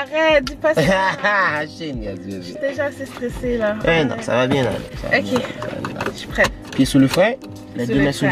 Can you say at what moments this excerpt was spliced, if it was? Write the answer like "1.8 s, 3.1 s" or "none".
none